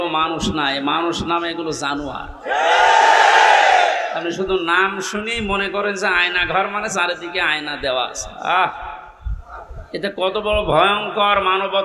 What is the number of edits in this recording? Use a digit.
0